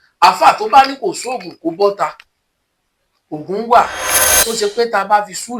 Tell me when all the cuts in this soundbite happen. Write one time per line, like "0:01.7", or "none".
0:04.2